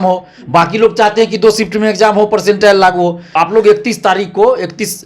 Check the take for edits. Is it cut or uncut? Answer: cut